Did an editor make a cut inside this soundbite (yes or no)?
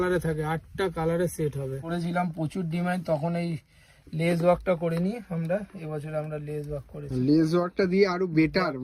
yes